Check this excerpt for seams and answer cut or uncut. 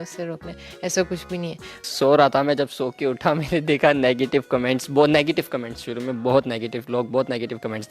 cut